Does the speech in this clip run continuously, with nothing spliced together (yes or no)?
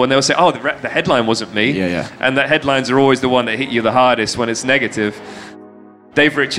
no